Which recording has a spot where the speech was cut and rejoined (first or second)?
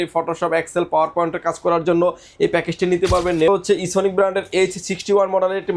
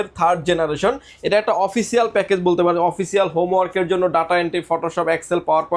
first